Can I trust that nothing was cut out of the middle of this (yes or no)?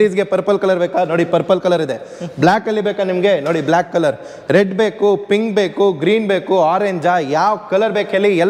yes